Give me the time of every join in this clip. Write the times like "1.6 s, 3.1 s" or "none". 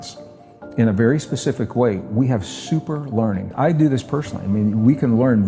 3.5 s